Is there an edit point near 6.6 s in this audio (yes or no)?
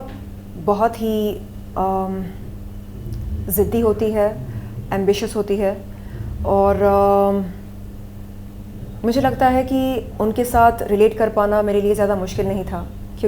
no